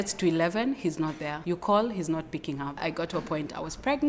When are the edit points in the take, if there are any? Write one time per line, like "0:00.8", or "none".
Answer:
0:01.3
0:02.8